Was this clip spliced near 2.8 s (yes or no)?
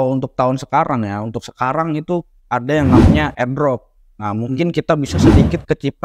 no